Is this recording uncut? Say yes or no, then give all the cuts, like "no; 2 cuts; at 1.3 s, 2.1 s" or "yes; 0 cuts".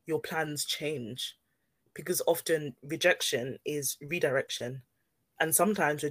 yes; 0 cuts